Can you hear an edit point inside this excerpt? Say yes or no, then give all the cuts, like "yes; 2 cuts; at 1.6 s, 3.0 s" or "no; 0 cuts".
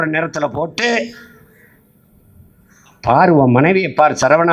no; 0 cuts